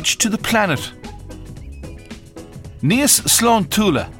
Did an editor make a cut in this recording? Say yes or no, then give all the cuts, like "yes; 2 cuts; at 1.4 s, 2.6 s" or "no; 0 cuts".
no; 0 cuts